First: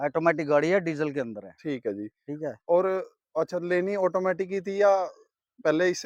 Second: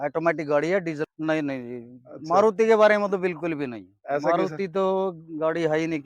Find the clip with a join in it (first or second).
second